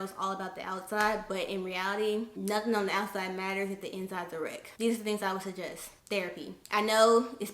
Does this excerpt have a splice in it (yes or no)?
no